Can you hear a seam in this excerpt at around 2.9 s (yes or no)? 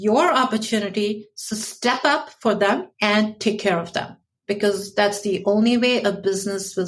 yes